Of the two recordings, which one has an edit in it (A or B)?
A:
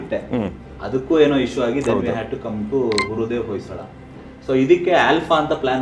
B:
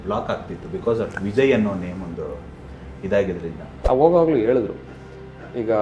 B